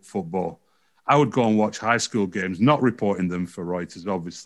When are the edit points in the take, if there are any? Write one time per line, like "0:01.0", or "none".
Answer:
none